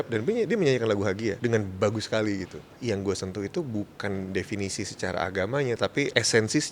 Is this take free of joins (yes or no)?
no